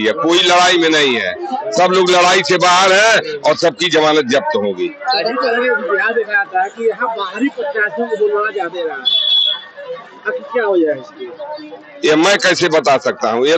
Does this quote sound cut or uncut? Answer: uncut